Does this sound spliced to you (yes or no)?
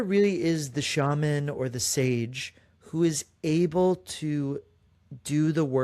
no